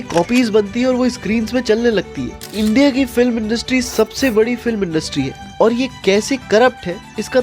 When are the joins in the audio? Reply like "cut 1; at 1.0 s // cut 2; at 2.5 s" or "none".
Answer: cut 1; at 2.4 s